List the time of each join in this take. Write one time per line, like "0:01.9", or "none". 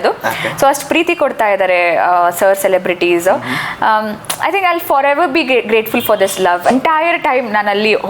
0:06.7